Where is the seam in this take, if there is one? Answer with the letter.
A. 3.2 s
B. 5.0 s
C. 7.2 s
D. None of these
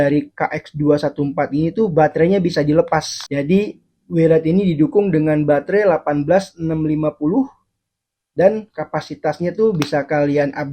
A